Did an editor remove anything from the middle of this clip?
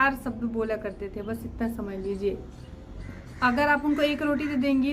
no; 0 cuts

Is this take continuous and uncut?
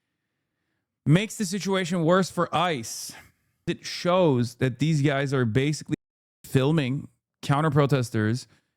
no; 1 cut; at 3.8 s

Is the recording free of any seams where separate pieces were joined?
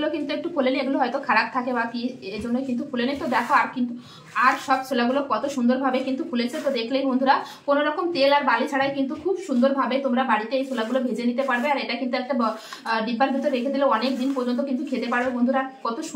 yes; 0 cuts

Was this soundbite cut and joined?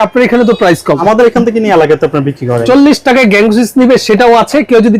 yes; 2 cuts; at 1.0 s, 2.6 s

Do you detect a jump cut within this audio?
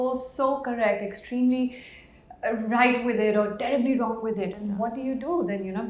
no; 0 cuts

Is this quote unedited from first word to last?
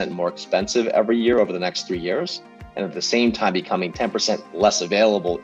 no; 1 cut; at 3.9 s

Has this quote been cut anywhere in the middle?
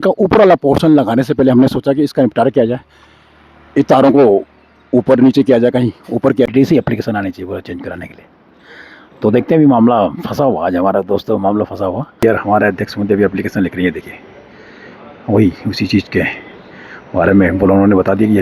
yes; 2 cuts; at 6.5 s, 12.2 s

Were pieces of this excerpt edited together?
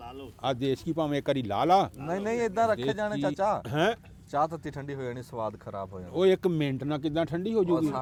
no; 0 cuts

